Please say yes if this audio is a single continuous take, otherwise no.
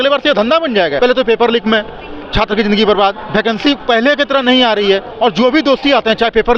no